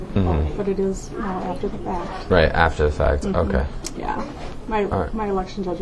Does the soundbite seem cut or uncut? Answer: uncut